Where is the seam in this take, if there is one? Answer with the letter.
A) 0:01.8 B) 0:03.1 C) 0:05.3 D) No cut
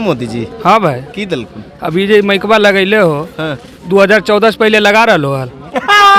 D